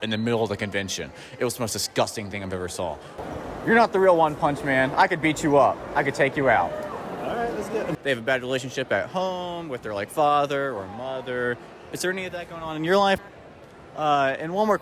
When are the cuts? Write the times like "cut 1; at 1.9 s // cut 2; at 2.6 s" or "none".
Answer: cut 1; at 3.2 s // cut 2; at 8.0 s // cut 3; at 13.2 s